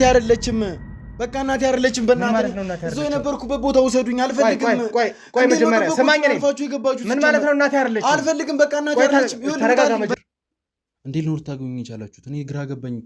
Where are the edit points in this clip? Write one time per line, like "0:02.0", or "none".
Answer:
0:10.2